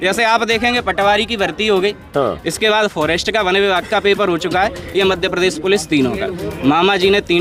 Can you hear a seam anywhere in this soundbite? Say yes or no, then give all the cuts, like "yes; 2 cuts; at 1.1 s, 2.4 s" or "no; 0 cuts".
no; 0 cuts